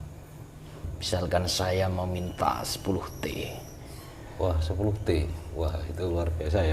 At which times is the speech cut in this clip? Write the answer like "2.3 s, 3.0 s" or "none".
0.9 s